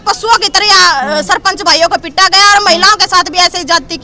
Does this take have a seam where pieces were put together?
no; 0 cuts

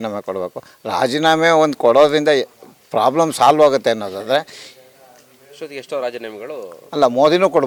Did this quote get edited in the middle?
no; 0 cuts

